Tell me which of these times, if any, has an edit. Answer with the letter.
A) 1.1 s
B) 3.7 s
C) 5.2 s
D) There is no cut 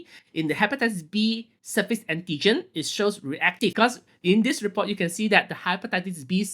B